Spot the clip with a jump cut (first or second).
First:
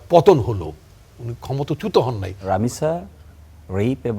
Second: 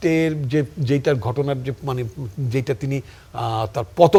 first